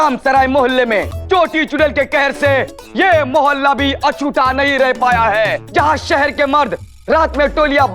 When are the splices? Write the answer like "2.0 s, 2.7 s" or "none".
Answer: 1.1 s, 5.6 s